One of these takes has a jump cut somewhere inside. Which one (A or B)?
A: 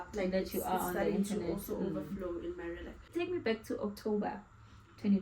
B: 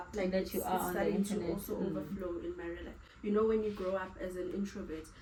A